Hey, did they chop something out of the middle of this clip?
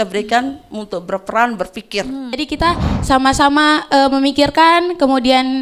yes; 1 cut; at 2.5 s

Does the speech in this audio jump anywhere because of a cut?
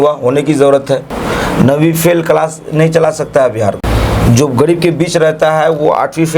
yes; 2 cuts; at 1.1 s, 3.8 s

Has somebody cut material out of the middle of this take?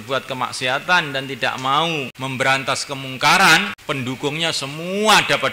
yes; 2 cuts; at 2.1 s, 3.7 s

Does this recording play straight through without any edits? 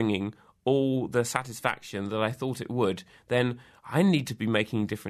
yes; 0 cuts

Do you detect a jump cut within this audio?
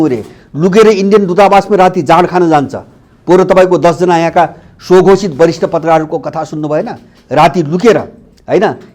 no; 0 cuts

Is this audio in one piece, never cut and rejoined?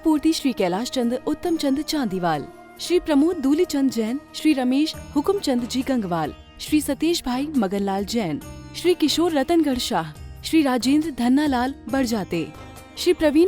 yes; 0 cuts

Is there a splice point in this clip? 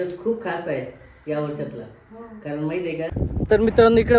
yes; 1 cut; at 3.1 s

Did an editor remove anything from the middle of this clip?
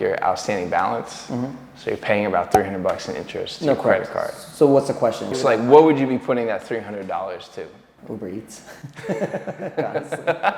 yes; 2 cuts; at 5.3 s, 7.9 s

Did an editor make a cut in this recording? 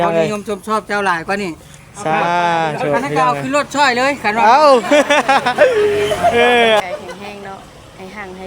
yes; 1 cut; at 6.8 s

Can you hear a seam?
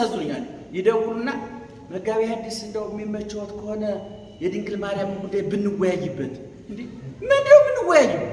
no; 0 cuts

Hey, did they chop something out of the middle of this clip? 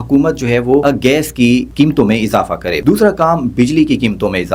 yes; 3 cuts; at 0.8 s, 1.7 s, 2.7 s

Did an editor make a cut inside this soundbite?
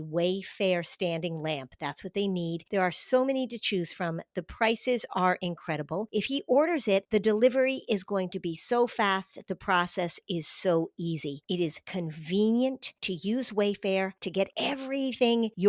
no; 0 cuts

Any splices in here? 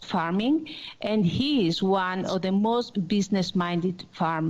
yes; 1 cut; at 2.9 s

